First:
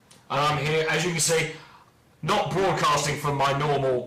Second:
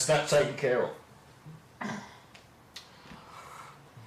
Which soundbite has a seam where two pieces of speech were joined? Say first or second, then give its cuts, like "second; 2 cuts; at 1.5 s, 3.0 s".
first; 1 cut; at 1.1 s